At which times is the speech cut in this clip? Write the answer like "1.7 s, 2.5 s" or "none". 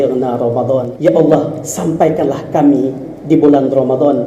0.9 s